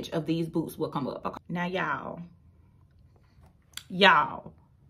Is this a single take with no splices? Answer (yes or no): no